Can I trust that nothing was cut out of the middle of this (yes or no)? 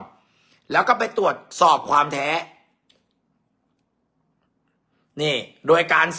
yes